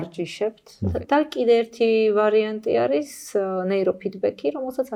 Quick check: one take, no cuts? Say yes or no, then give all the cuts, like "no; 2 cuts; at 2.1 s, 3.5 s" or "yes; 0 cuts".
no; 1 cut; at 1.0 s